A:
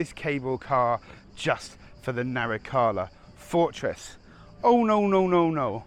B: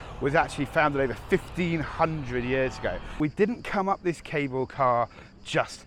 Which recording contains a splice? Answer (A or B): B